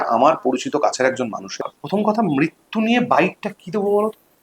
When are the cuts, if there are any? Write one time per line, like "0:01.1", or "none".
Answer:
0:01.7